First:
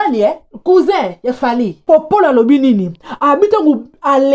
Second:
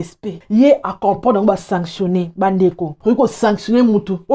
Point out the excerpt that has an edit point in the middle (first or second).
first